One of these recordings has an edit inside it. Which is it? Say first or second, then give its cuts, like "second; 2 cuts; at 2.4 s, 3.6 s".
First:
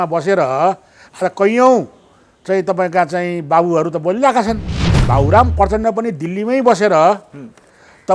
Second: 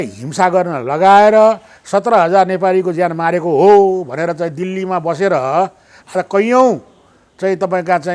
first; 1 cut; at 4.9 s